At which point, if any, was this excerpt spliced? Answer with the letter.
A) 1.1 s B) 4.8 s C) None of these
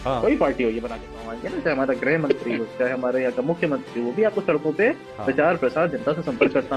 A